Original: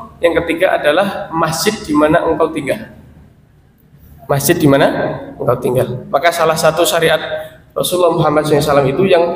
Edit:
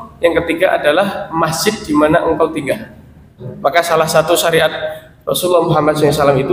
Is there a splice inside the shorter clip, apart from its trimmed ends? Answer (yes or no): yes